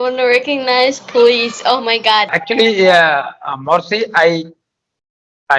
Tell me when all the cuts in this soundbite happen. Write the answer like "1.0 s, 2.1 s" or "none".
2.4 s